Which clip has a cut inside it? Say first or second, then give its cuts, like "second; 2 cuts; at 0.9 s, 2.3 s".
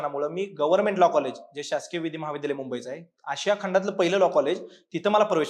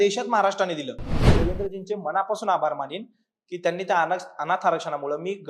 second; 1 cut; at 1.3 s